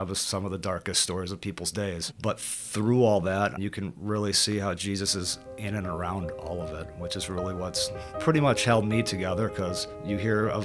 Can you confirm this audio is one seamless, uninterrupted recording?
yes; 0 cuts

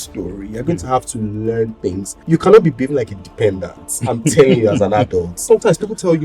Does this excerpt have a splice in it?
yes; 2 cuts; at 2.1 s, 5.4 s

